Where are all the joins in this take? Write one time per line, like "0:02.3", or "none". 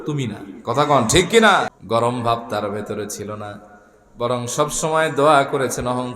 0:01.7